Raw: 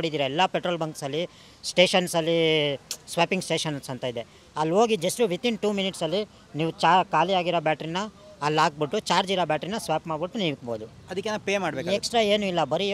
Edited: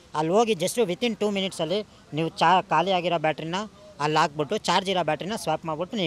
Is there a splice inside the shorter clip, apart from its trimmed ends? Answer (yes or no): no